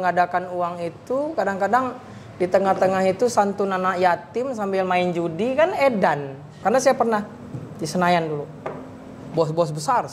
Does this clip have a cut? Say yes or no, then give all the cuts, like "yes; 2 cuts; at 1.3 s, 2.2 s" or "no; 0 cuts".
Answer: yes; 1 cut; at 6.6 s